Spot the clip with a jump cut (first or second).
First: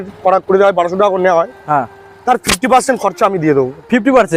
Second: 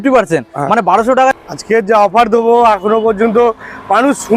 second